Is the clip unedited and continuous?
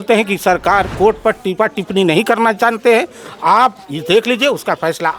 no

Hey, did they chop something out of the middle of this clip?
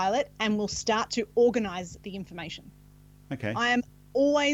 no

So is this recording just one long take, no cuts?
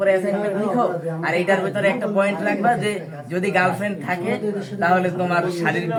yes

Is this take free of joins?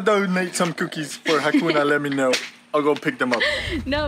yes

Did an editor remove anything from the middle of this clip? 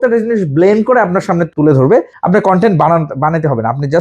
yes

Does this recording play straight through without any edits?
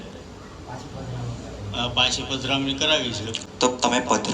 no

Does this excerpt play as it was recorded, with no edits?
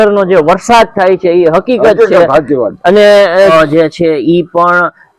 no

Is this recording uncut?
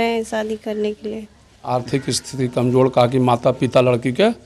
no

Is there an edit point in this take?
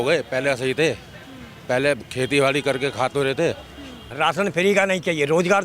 yes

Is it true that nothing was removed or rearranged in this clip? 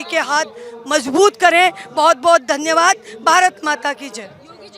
yes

